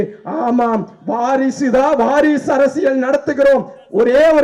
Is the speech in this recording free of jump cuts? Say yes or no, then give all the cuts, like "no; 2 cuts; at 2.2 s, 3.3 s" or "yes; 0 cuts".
yes; 0 cuts